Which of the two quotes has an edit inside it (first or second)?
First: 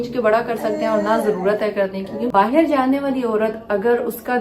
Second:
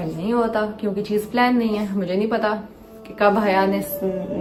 first